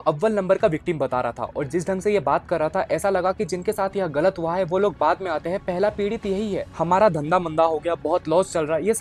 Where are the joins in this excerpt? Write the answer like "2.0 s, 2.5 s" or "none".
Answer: none